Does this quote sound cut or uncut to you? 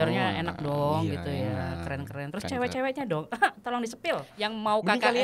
cut